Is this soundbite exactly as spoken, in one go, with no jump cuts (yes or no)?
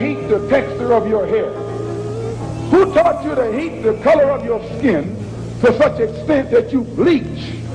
yes